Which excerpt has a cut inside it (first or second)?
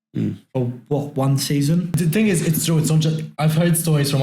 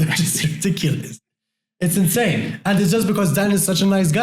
first